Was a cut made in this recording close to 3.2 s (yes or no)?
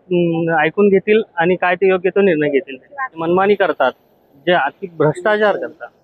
yes